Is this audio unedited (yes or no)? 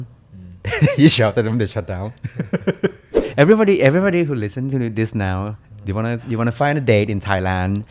no